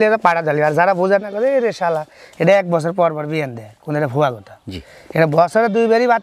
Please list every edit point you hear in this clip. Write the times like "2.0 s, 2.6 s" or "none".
none